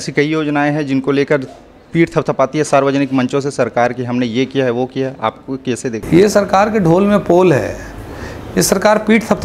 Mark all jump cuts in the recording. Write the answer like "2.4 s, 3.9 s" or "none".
none